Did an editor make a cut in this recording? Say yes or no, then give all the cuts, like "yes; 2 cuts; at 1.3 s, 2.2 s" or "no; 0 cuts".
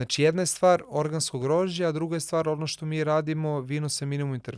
no; 0 cuts